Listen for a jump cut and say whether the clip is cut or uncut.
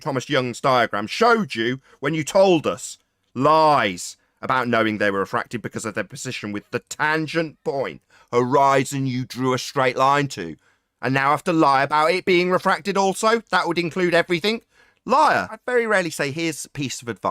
cut